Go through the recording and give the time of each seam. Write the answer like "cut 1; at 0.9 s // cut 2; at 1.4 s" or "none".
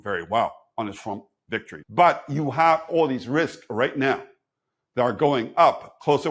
cut 1; at 1.7 s